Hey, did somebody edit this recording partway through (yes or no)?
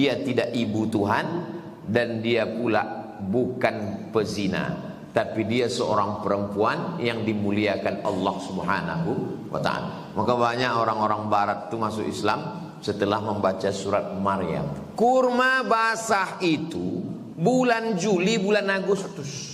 yes